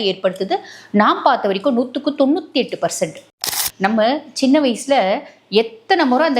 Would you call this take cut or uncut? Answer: cut